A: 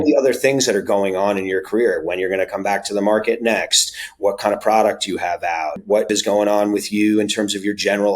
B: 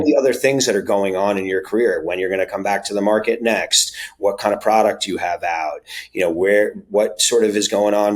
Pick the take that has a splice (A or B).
A